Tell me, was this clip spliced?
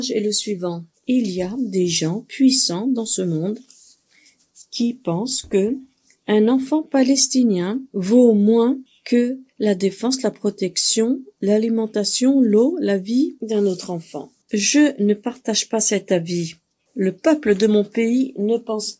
no; 0 cuts

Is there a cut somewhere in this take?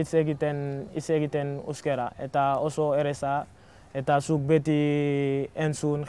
no; 0 cuts

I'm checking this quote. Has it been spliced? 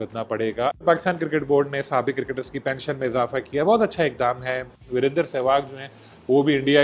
yes; 2 cuts; at 0.8 s, 4.8 s

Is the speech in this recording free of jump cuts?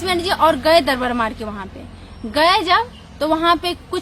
yes; 0 cuts

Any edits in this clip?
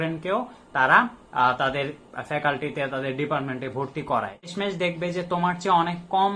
yes; 1 cut; at 4.5 s

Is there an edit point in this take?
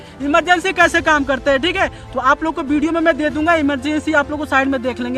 no; 0 cuts

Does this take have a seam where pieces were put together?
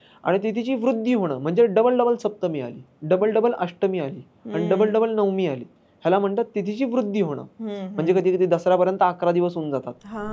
no; 0 cuts

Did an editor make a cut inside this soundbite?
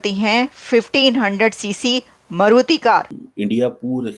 yes; 1 cut; at 3.2 s

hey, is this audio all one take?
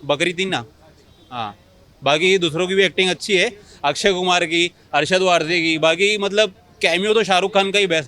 yes; 0 cuts

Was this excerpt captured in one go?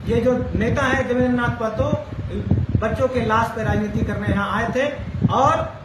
yes; 0 cuts

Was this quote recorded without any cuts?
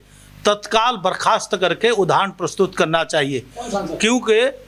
yes; 0 cuts

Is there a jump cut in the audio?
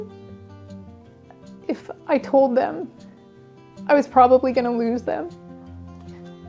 no; 0 cuts

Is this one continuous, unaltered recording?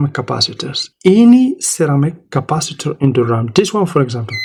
yes; 0 cuts

